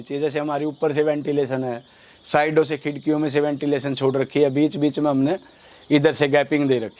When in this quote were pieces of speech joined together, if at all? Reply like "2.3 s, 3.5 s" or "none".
none